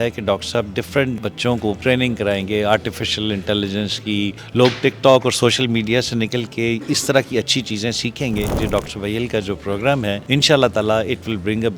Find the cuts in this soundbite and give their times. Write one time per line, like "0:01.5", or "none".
0:01.5
0:04.4
0:08.6
0:10.2